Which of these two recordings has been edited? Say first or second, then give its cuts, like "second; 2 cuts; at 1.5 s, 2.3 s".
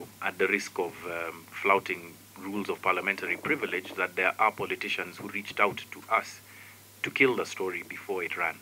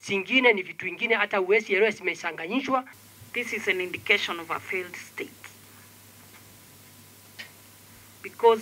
second; 1 cut; at 3.0 s